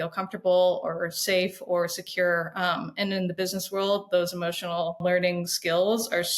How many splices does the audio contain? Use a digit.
1